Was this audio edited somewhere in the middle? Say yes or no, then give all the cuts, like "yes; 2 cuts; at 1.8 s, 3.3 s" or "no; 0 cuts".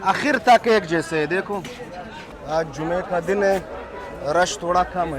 yes; 1 cut; at 2.4 s